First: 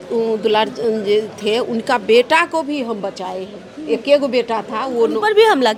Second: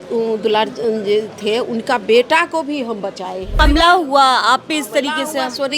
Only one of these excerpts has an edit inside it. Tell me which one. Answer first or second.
second